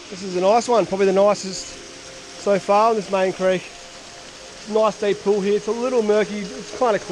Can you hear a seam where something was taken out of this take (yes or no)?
no